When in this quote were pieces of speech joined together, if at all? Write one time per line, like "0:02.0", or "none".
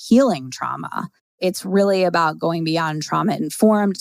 0:01.3